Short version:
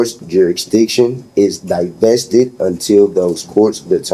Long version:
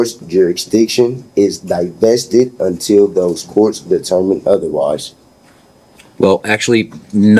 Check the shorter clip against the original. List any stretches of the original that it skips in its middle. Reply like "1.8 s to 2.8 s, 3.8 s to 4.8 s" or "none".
none